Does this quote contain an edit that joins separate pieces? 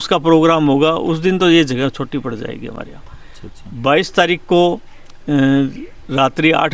no; 0 cuts

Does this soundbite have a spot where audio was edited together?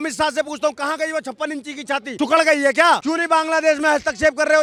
no; 0 cuts

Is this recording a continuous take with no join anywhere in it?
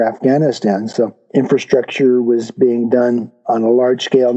yes; 0 cuts

